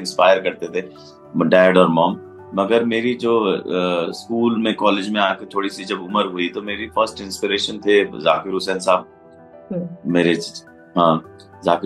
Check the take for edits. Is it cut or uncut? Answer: uncut